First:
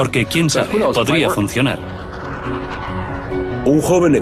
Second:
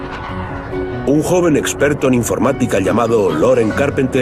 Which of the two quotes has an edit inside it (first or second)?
second